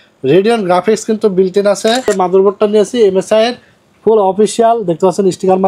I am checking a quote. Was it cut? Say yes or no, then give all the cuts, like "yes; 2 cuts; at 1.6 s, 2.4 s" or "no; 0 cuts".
yes; 1 cut; at 2.1 s